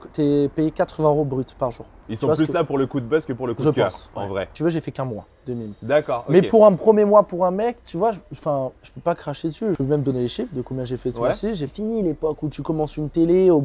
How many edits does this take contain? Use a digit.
4